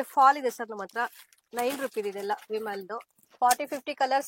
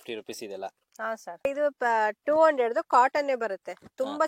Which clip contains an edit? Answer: first; 1 cut; at 3.2 s

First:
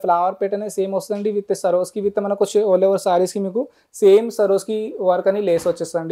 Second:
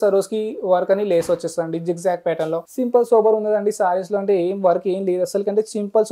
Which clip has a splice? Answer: second; 1 cut; at 2.7 s

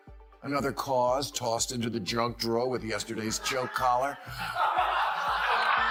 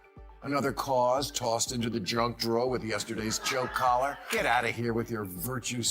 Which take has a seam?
second; 1 cut; at 4.2 s

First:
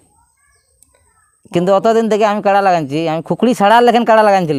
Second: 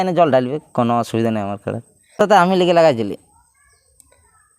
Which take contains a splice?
second; 1 cut; at 2.2 s

